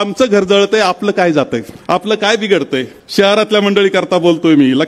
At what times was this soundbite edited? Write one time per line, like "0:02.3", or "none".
0:01.7
0:03.0